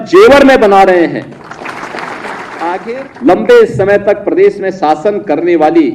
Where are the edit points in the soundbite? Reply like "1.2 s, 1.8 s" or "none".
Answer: 2.8 s